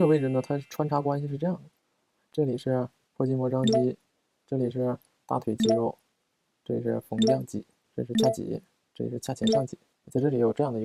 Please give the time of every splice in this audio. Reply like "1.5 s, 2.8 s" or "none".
none

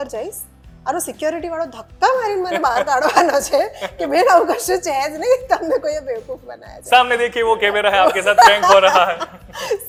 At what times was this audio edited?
none

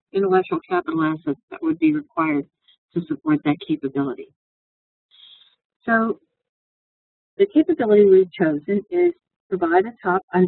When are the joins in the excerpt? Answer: 9.3 s

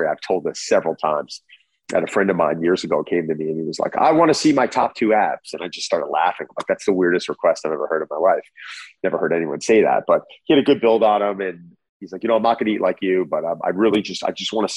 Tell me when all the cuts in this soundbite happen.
1.7 s

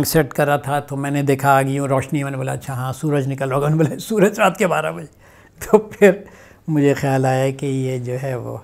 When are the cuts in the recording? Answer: none

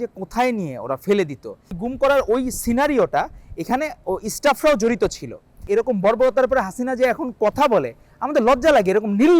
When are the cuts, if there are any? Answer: 1.8 s, 5.6 s

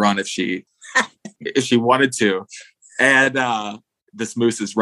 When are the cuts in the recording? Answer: none

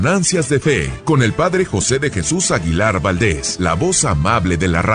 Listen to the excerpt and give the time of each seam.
0.9 s, 3.5 s

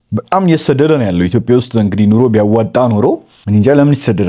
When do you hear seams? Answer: 3.3 s

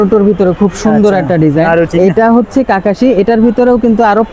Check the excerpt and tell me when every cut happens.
1.9 s

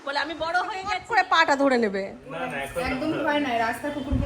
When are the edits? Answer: 0.9 s

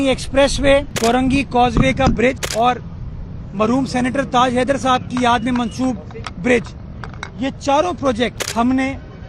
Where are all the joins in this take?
0.9 s, 2.4 s, 8.4 s

